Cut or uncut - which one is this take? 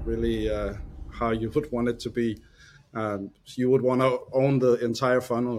uncut